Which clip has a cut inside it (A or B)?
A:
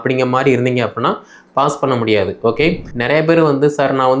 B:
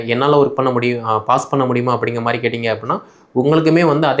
A